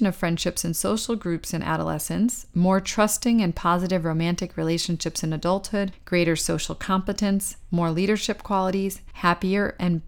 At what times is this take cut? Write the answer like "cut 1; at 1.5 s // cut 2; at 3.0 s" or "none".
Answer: cut 1; at 6.0 s // cut 2; at 9.0 s

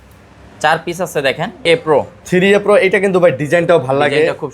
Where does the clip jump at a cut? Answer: cut 1; at 1.6 s

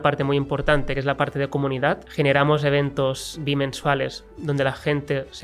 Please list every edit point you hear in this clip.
cut 1; at 1.0 s // cut 2; at 2.1 s // cut 3; at 3.4 s

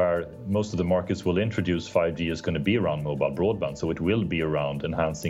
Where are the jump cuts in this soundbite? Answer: none

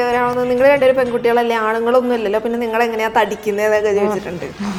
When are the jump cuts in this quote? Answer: none

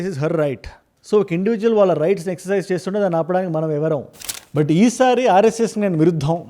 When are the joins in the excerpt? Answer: cut 1; at 4.2 s

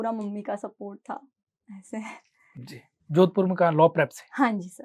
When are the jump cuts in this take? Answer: none

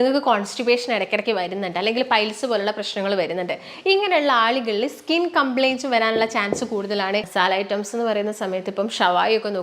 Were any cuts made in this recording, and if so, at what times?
cut 1; at 7.3 s

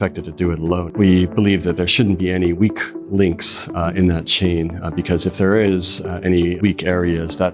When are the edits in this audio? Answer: cut 1; at 0.9 s // cut 2; at 6.6 s

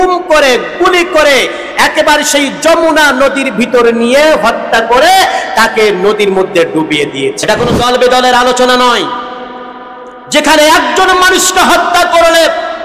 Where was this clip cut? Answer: cut 1; at 7.4 s

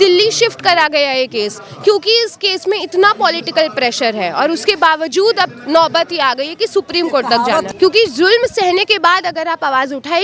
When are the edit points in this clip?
cut 1; at 7.7 s

